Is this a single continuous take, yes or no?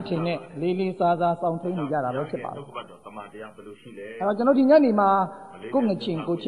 yes